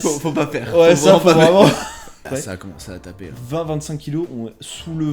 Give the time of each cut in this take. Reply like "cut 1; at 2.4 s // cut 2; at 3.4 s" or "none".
cut 1; at 2.2 s

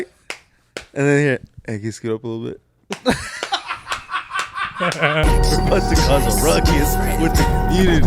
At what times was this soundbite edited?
cut 1; at 5.2 s

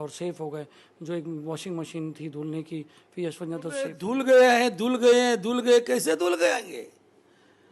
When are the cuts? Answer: cut 1; at 4.0 s

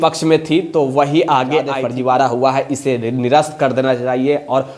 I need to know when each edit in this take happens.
cut 1; at 1.8 s

